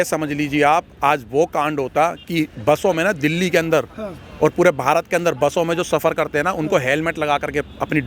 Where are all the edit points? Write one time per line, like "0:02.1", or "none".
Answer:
none